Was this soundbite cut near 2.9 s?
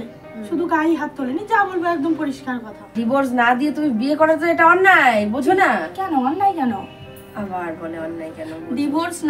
yes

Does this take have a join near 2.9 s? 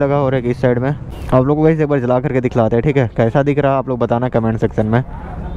no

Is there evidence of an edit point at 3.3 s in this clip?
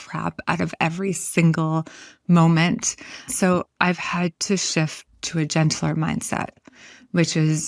yes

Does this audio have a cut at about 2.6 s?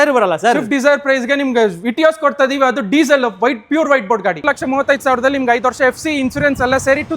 no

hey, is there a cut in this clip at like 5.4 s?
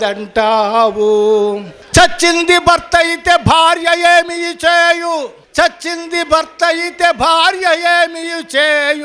yes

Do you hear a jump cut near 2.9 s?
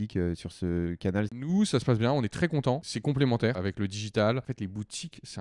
yes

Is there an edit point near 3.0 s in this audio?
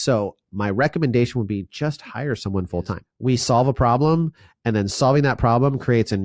yes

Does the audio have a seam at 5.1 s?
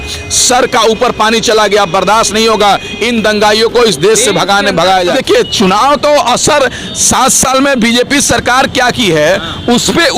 yes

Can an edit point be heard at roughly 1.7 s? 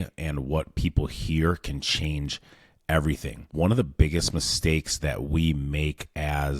no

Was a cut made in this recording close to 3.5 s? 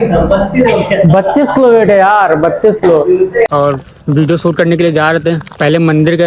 yes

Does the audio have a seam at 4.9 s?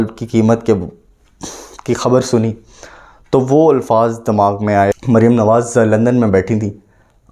yes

